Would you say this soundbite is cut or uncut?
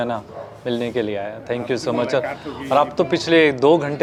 uncut